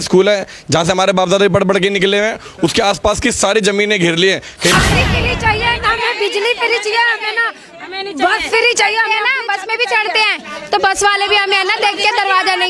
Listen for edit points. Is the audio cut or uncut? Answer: cut